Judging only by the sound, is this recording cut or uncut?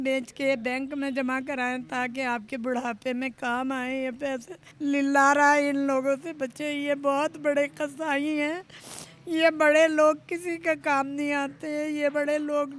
cut